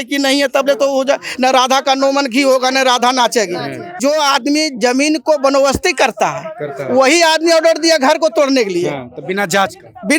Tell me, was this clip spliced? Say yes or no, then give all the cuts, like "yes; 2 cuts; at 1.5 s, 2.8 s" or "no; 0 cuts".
yes; 1 cut; at 4.0 s